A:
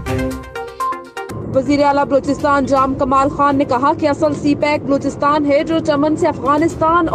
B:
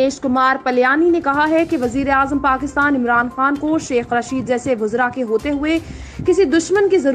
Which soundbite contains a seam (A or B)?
A